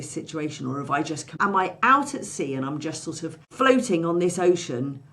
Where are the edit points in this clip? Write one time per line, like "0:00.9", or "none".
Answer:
0:01.3
0:03.4